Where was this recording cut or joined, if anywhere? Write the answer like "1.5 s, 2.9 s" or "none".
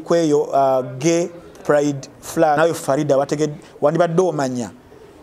2.6 s